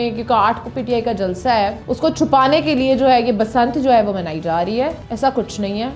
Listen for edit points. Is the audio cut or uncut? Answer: cut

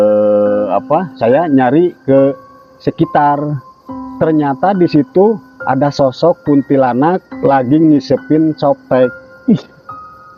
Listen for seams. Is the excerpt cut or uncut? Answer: uncut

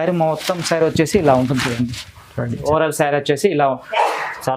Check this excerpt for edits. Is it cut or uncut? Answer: cut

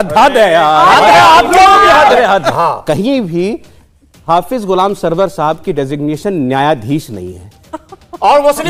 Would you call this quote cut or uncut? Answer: cut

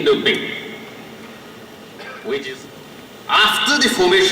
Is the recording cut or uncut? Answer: cut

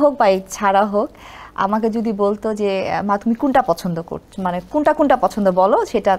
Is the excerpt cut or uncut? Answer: uncut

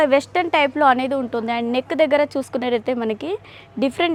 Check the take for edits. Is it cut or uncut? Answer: uncut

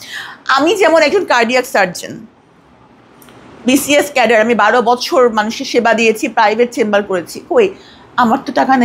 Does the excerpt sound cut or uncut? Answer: uncut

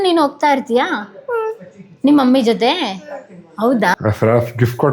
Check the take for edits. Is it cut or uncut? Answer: cut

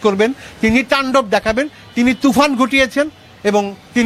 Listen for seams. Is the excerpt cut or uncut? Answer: uncut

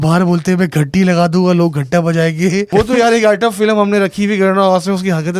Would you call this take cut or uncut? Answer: cut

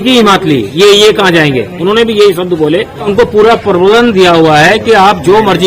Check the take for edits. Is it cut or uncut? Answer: cut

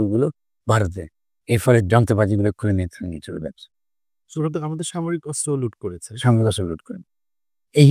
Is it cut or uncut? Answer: uncut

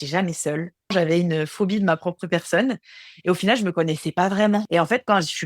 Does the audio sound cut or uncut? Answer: cut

